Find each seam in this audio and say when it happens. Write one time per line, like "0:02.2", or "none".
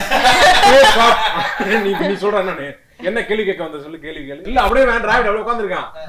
0:04.5